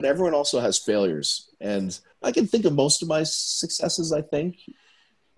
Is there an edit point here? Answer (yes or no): yes